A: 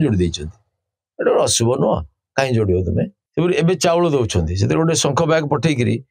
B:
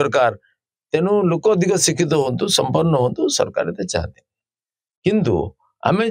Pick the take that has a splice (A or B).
A